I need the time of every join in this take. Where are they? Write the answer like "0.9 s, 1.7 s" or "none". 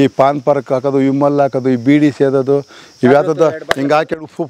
none